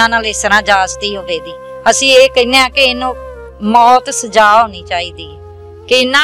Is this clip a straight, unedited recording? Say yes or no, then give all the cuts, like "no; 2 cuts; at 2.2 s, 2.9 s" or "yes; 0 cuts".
yes; 0 cuts